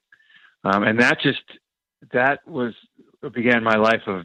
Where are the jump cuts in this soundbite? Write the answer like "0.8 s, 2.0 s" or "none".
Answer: none